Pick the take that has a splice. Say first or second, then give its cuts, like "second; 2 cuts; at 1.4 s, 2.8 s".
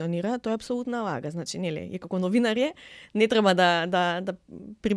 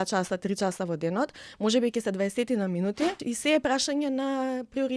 second; 1 cut; at 3.2 s